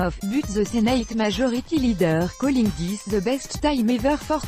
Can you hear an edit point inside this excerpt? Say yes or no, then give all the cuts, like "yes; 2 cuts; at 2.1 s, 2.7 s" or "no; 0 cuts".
no; 0 cuts